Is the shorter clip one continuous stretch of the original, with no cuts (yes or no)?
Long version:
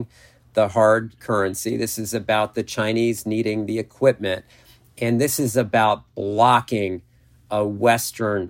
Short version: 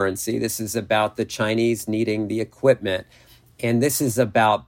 yes